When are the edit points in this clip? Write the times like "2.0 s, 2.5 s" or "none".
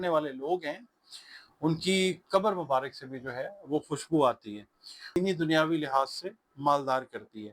5.1 s